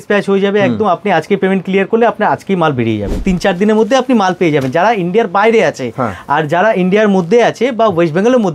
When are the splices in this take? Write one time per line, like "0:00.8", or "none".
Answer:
0:03.2

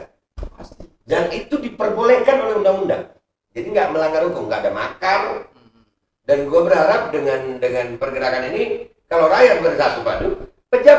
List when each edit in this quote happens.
none

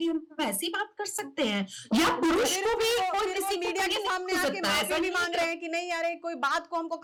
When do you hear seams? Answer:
none

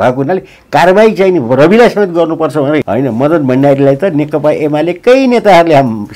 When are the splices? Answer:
0:02.9

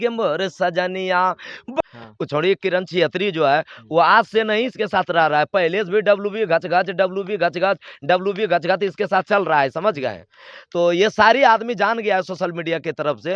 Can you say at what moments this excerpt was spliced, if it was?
0:01.8

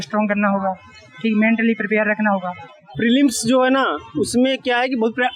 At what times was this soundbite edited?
0:02.9

